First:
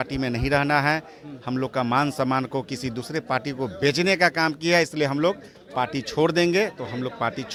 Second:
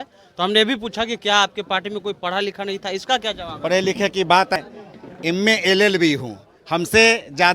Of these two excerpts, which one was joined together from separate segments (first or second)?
second